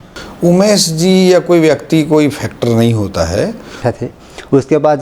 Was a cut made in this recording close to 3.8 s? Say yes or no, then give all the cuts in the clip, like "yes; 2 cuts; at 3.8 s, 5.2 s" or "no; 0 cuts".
yes; 1 cut; at 3.8 s